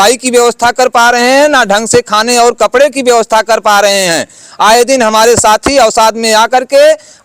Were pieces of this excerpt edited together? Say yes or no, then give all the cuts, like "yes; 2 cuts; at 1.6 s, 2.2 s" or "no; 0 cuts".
no; 0 cuts